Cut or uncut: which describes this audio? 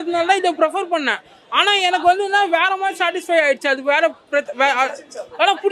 uncut